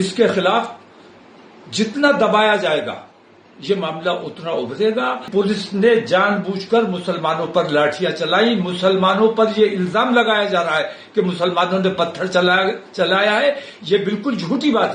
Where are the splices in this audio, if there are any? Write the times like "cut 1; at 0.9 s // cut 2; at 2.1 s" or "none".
cut 1; at 5.3 s